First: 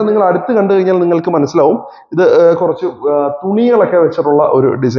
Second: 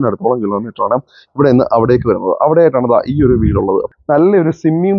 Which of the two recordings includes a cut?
second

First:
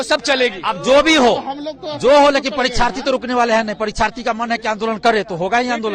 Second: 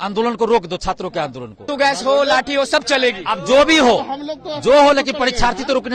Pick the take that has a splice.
second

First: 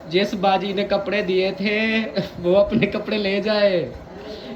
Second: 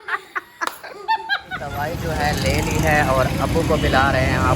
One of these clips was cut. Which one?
second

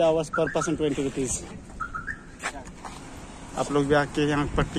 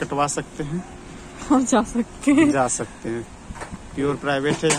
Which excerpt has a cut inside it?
first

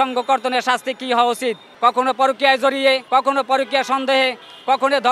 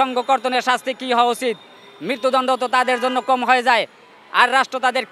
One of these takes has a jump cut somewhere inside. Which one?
first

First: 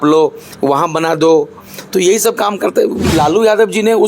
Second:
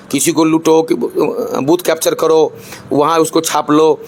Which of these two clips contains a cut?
first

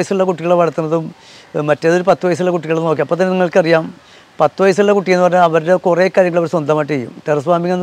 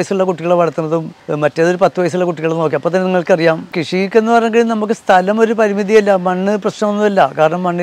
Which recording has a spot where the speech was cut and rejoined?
second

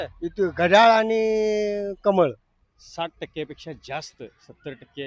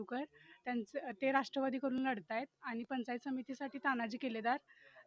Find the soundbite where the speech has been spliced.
first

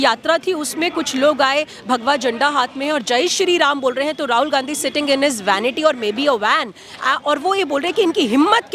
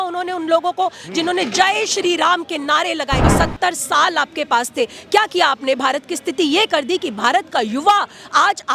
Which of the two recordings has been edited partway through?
second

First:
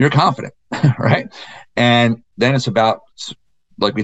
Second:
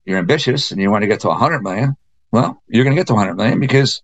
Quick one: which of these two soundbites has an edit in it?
first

